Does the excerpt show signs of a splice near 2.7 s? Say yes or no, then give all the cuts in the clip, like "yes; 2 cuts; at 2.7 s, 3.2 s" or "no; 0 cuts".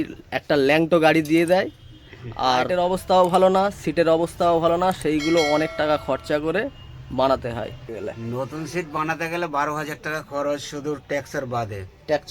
yes; 2 cuts; at 2.7 s, 7.9 s